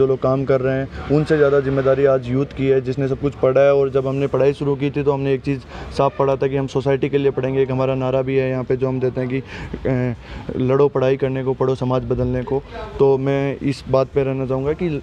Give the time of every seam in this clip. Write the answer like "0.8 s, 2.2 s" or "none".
none